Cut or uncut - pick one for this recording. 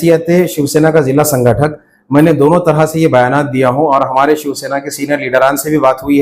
uncut